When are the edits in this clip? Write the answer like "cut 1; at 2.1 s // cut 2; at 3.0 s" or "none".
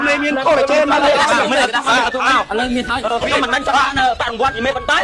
none